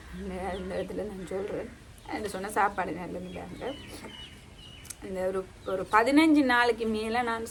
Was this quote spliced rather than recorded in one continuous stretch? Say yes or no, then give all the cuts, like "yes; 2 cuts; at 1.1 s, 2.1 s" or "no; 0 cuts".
no; 0 cuts